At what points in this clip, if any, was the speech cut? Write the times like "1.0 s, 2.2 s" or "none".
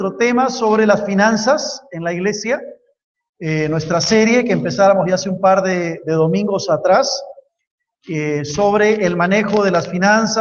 none